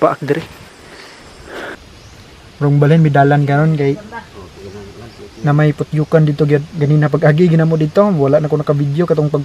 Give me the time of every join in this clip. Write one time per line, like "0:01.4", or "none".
0:01.8